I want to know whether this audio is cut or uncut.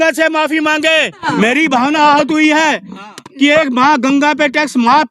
cut